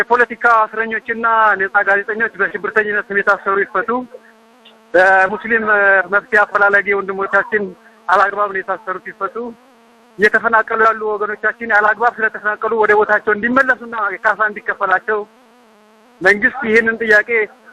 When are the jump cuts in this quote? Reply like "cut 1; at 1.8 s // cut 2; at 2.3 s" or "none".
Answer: none